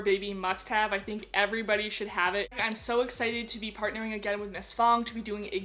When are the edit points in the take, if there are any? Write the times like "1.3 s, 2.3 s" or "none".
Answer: 2.6 s